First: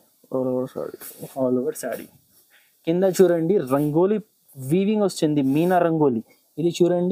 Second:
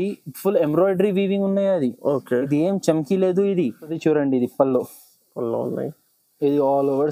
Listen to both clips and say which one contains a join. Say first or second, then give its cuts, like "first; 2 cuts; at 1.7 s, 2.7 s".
second; 1 cut; at 4.0 s